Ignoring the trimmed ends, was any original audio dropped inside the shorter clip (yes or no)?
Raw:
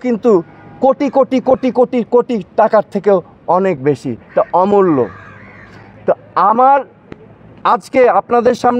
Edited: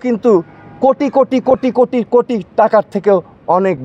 no